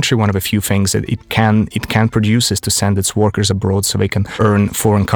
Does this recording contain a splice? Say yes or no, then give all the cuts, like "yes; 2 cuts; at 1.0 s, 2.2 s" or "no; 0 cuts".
yes; 1 cut; at 4.2 s